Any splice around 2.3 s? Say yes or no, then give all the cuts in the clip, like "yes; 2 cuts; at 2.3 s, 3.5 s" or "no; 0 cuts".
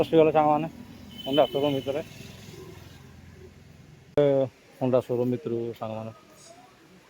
no; 1 cut; at 4.2 s